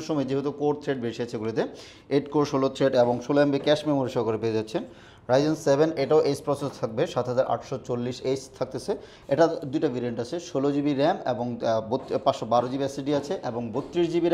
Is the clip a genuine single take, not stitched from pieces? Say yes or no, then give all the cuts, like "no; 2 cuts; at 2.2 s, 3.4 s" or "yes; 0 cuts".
yes; 0 cuts